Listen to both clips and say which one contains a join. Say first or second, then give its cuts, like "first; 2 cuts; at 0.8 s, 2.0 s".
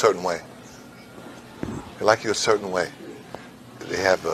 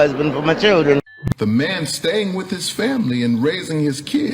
second; 1 cut; at 1.2 s